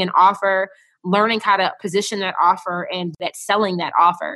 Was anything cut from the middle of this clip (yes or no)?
yes